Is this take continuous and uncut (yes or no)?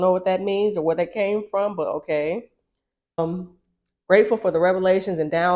no